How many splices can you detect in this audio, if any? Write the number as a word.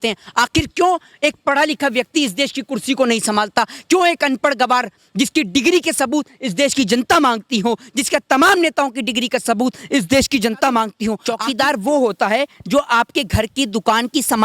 one